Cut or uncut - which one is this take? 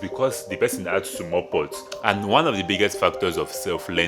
cut